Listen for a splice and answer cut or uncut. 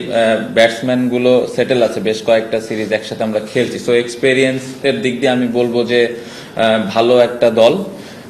uncut